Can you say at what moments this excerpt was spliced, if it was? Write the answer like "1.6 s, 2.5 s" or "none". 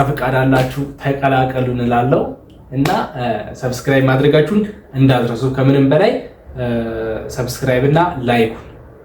none